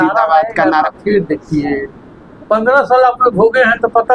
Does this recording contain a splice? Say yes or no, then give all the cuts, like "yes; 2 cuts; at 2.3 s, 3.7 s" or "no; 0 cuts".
no; 0 cuts